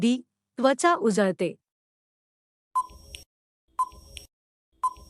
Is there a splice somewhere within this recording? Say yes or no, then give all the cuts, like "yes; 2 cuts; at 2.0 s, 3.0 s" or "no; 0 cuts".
yes; 1 cut; at 2.5 s